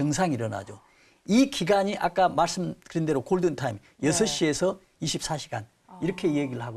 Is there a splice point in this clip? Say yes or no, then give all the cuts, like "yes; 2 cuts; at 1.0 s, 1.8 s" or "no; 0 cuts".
no; 0 cuts